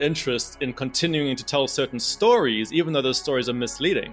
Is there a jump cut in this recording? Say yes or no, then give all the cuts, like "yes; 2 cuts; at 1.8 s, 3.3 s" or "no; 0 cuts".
no; 0 cuts